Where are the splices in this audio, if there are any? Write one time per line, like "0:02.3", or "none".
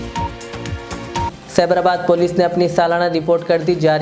0:01.3